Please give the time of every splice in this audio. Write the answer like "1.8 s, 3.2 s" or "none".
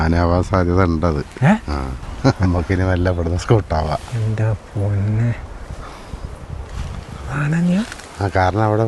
2.4 s

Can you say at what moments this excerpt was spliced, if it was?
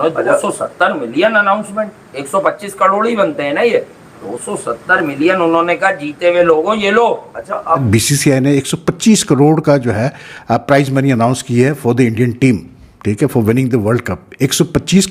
7.7 s

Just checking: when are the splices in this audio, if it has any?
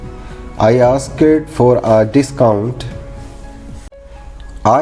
3.8 s

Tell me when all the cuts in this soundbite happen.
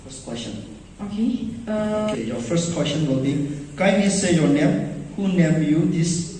2.1 s

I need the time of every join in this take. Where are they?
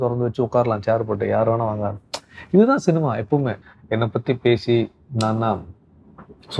3.6 s

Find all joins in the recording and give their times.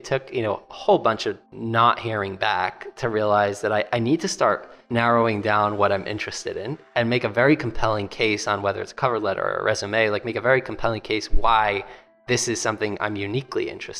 1.5 s, 4.8 s

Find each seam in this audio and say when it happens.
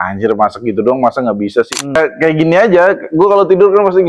2.0 s

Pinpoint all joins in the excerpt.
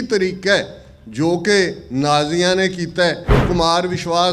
3.3 s

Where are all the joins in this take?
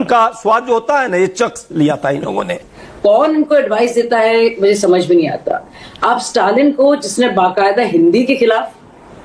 2.6 s

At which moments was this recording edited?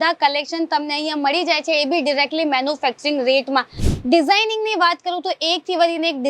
3.8 s

